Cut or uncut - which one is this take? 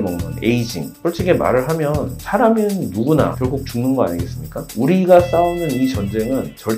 cut